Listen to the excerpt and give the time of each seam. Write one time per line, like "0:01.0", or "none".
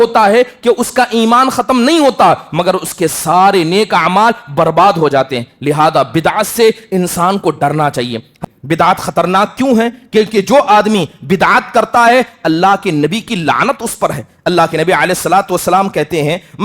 0:08.4